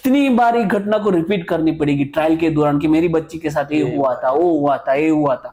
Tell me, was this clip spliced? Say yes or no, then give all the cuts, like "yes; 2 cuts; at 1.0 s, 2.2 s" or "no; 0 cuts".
no; 0 cuts